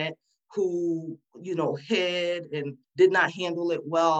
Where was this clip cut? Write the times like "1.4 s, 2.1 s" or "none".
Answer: 2.8 s